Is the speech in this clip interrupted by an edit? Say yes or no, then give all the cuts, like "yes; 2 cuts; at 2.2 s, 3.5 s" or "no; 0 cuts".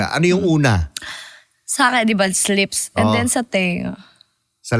no; 0 cuts